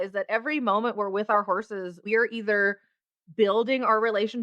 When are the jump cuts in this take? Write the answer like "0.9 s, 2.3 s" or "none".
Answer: 2.0 s